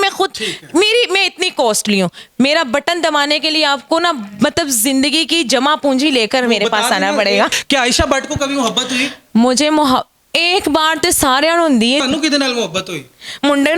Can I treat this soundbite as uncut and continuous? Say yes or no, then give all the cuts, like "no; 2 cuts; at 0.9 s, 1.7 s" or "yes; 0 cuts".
no; 2 cuts; at 7.5 s, 12.0 s